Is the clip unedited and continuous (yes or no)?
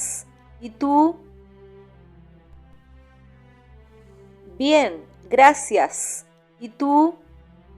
no